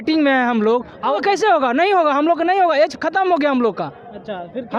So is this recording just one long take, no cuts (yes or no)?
no